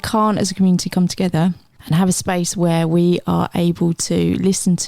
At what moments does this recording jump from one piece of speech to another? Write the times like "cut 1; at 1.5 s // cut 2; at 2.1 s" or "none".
cut 1; at 1.7 s